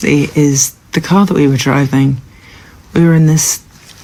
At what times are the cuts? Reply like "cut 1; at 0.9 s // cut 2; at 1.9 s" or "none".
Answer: none

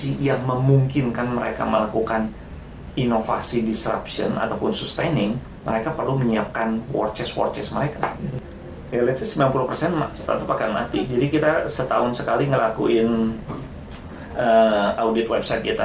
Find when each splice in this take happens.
cut 1; at 8.3 s

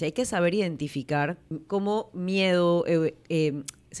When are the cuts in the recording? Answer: cut 1; at 1.5 s

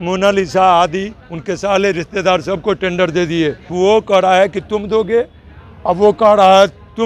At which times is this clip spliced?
cut 1; at 3.7 s

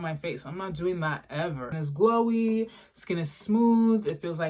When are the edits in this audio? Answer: cut 1; at 1.7 s

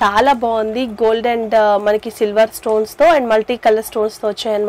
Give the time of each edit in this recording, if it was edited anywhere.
none

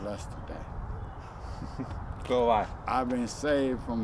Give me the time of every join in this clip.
none

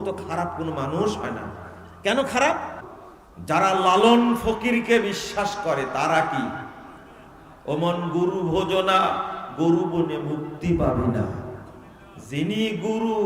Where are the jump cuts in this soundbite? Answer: cut 1; at 2.9 s

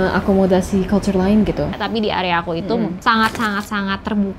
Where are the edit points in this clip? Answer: cut 1; at 1.7 s

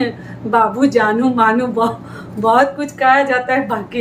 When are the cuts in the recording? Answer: none

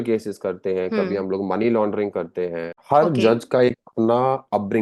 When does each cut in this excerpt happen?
cut 1; at 2.7 s

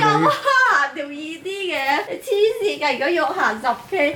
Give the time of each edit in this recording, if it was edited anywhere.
cut 1; at 2.1 s

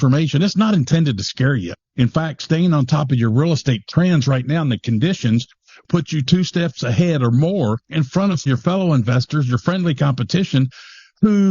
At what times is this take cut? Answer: cut 1; at 1.7 s // cut 2; at 5.8 s // cut 3; at 8.5 s

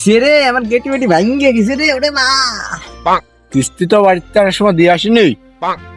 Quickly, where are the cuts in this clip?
cut 1; at 3.4 s

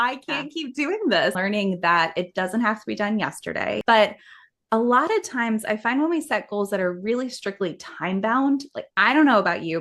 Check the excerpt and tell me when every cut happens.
cut 1; at 1.4 s // cut 2; at 3.8 s

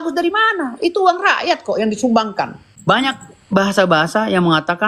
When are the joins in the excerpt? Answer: cut 1; at 2.6 s

